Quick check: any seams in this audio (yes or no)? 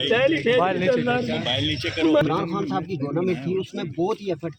yes